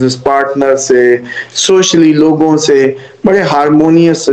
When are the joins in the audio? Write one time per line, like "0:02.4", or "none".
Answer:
none